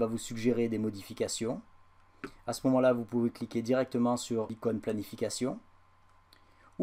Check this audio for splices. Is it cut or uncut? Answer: cut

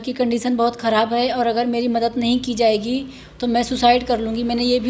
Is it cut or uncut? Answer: uncut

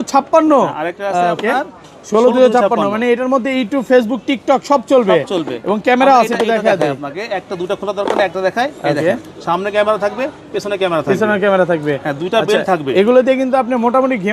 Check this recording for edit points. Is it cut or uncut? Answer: uncut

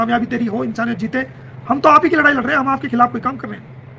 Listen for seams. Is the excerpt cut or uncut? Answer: uncut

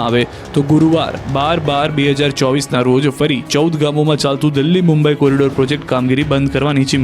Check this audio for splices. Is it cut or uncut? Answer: uncut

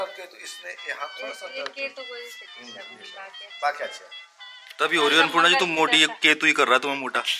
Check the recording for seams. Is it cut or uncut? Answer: uncut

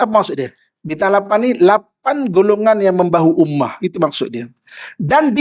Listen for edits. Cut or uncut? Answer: cut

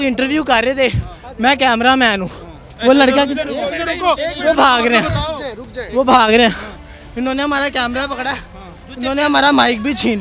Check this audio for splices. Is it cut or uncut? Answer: uncut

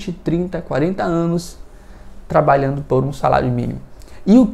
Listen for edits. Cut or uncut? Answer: uncut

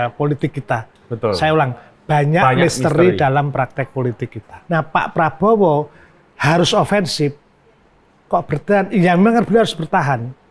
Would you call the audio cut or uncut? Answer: cut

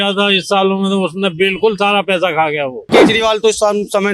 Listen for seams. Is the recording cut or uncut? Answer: cut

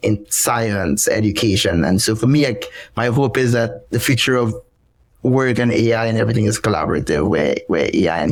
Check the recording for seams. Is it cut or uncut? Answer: uncut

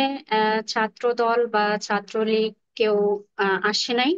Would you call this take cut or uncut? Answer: uncut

